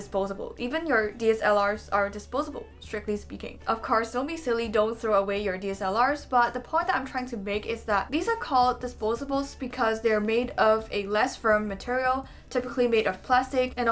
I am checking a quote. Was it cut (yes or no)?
no